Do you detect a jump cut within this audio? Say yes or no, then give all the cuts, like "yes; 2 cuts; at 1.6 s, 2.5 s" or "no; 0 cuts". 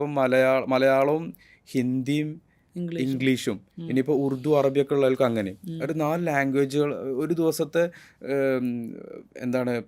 no; 0 cuts